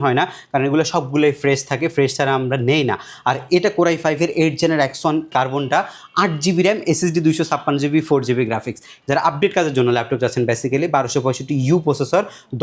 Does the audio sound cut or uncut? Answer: cut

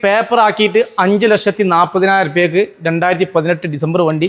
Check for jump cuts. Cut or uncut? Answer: uncut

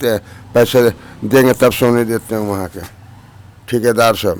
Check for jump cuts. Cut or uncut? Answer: uncut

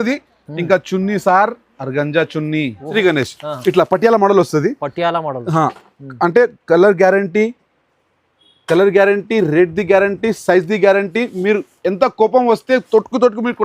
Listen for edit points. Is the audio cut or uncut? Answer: cut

